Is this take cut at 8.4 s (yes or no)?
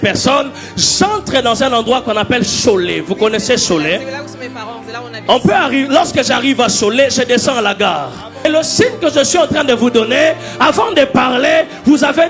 yes